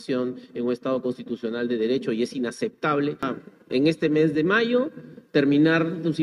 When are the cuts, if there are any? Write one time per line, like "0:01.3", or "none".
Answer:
0:03.3